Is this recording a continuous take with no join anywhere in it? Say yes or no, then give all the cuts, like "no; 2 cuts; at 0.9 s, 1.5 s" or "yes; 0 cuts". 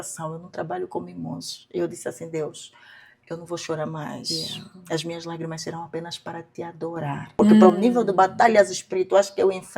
no; 1 cut; at 7.3 s